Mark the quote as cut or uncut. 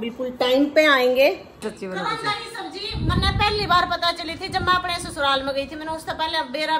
cut